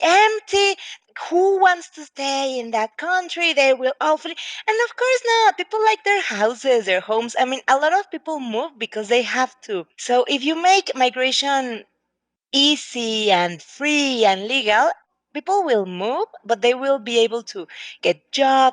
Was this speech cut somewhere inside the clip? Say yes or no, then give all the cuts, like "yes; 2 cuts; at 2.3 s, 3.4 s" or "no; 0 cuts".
yes; 1 cut; at 0.9 s